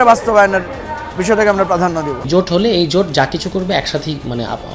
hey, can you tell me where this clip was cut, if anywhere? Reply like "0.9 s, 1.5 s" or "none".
2.3 s